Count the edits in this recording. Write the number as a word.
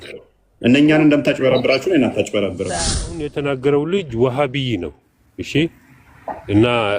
one